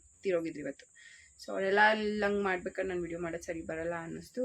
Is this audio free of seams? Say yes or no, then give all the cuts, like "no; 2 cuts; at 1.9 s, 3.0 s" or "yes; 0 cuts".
yes; 0 cuts